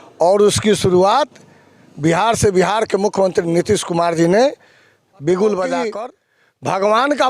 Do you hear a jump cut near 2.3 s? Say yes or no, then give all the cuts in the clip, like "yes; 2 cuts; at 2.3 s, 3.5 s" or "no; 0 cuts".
no; 1 cut; at 6.0 s